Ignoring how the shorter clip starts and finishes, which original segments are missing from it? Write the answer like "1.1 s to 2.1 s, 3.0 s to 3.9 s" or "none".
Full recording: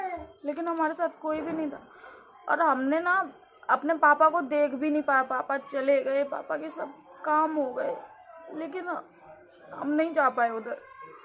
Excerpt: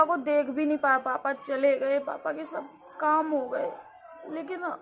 none

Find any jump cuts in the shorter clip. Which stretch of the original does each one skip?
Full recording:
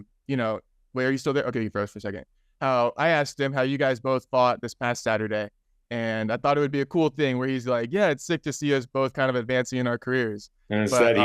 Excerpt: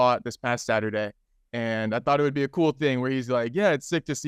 none

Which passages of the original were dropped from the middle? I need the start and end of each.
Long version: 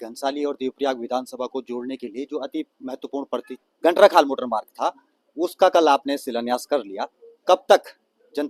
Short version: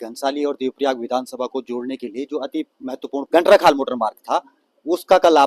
3.3 s to 3.8 s

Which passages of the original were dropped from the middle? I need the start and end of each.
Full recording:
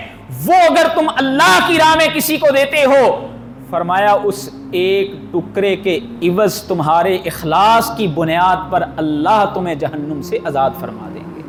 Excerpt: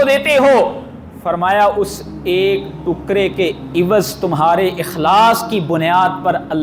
none

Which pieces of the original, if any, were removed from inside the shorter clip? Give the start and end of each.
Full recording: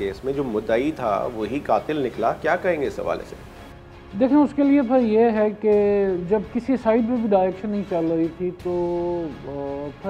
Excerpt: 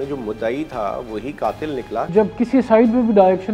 2.4 s to 6.2 s

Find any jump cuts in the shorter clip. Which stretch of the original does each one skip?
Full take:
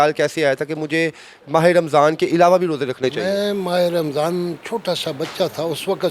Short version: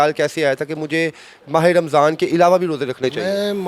none

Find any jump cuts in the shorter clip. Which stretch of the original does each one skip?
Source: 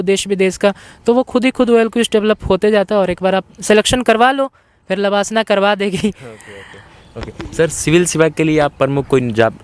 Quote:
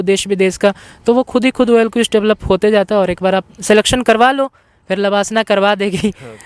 none

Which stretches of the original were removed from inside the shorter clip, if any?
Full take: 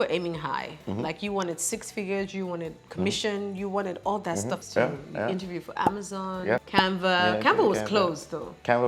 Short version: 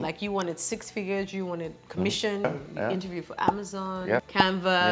3.4 s to 4.8 s

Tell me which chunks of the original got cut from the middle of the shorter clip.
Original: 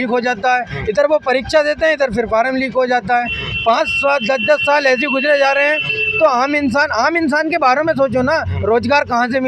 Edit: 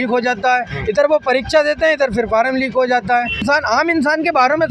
3.4 s to 6.7 s

